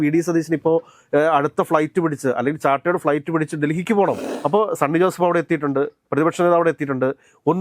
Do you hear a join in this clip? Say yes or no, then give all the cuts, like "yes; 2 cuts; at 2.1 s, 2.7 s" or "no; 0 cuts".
yes; 1 cut; at 4.2 s